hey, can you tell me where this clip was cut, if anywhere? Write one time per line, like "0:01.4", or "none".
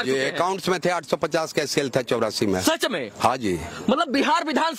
none